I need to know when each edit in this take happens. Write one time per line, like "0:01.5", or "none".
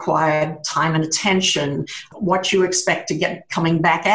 0:02.1